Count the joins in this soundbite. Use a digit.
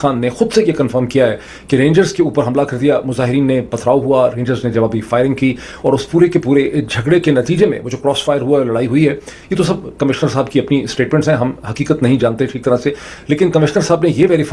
0